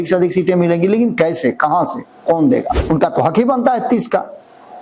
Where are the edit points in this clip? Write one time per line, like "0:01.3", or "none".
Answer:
0:02.8